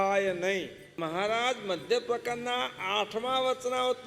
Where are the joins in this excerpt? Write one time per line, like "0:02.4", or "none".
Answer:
0:01.0